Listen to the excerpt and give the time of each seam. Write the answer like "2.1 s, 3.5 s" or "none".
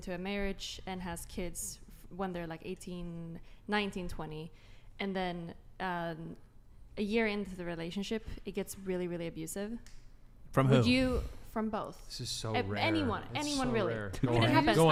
none